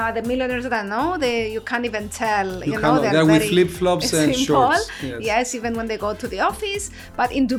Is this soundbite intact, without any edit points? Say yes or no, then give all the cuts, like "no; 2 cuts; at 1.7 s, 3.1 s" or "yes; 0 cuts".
yes; 0 cuts